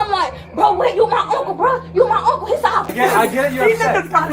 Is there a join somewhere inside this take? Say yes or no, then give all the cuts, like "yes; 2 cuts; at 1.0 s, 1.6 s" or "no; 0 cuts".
yes; 1 cut; at 2.9 s